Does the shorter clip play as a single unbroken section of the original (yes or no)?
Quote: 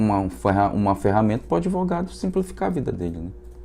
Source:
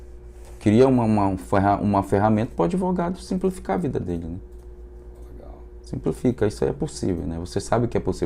yes